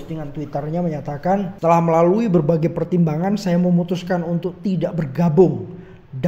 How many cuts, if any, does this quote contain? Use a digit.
1